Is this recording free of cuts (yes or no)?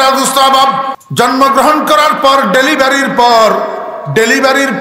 no